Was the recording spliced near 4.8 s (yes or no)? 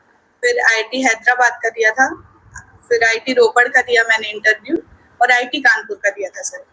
no